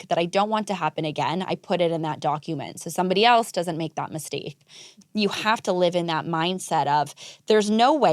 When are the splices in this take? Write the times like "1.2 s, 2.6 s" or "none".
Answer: 4.9 s